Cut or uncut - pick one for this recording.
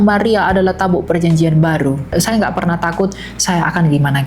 cut